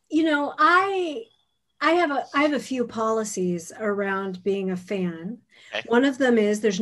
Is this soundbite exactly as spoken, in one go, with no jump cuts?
yes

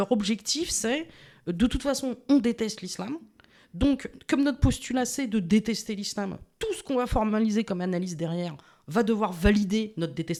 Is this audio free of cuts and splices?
yes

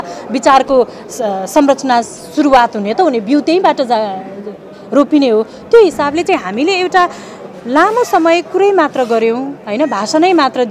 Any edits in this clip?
no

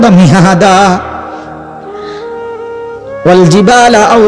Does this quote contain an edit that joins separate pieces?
no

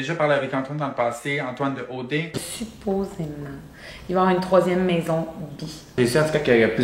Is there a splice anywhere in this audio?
yes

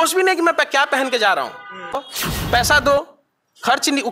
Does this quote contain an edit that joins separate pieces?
yes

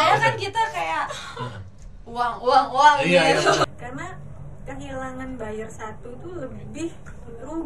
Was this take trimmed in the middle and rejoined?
yes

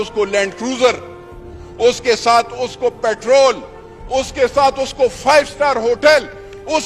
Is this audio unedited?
yes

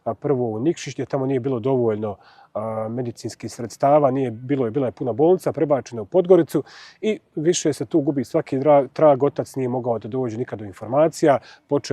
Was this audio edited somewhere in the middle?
no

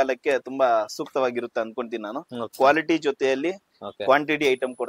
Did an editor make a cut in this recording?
yes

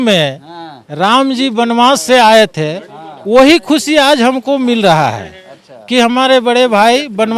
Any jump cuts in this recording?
no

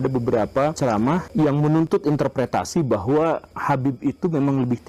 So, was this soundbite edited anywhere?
yes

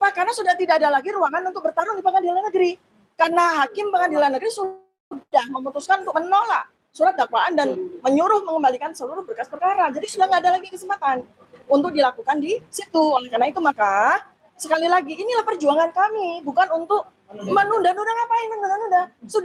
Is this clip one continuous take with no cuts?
yes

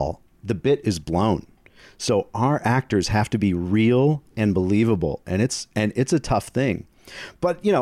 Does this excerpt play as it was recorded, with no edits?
yes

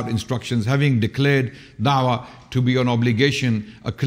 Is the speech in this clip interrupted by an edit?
no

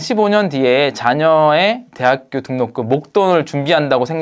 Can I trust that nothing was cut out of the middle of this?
yes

